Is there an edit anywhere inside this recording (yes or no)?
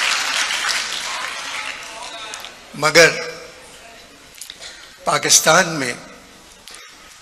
no